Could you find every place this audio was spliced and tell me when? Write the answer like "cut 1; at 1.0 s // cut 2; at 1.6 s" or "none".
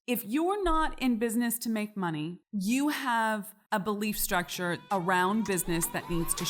none